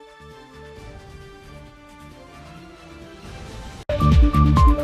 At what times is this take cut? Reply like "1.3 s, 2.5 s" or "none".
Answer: 3.8 s